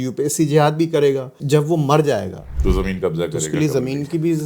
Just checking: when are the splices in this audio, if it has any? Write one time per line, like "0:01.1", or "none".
0:01.4
0:02.4